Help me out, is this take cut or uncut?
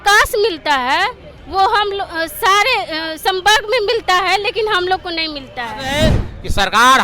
cut